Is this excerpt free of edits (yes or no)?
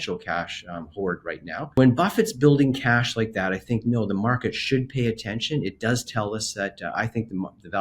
no